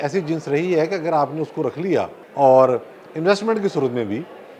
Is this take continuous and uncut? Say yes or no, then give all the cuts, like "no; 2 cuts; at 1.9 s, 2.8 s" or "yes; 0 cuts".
no; 1 cut; at 2.2 s